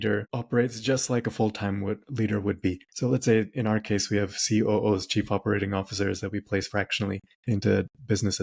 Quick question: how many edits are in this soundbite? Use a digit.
2